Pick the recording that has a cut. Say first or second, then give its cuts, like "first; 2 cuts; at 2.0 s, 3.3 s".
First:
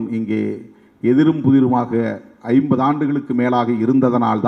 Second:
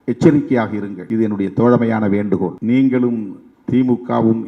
second; 2 cuts; at 0.9 s, 2.6 s